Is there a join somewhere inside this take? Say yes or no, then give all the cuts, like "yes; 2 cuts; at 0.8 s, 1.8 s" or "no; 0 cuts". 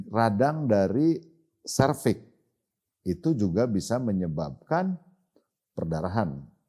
no; 0 cuts